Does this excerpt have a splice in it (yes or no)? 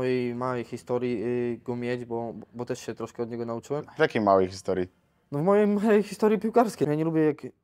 yes